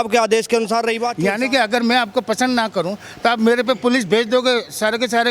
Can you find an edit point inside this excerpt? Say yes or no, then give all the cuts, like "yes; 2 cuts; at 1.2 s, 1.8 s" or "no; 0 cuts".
yes; 1 cut; at 1.1 s